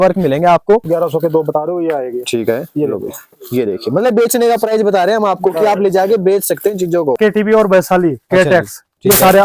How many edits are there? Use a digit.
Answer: 2